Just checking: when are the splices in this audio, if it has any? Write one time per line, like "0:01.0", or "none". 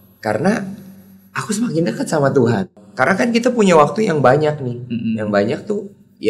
0:02.7